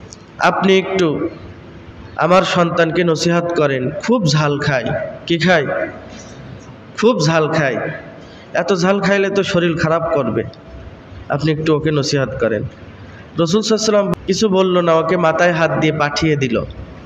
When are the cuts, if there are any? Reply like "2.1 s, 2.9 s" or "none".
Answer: 14.1 s